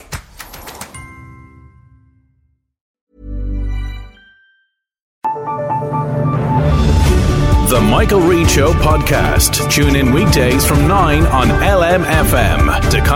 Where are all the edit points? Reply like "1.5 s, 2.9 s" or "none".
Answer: 2.8 s, 5.1 s